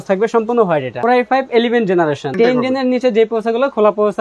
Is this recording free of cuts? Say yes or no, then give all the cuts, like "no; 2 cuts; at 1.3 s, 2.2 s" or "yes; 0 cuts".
no; 2 cuts; at 0.9 s, 2.3 s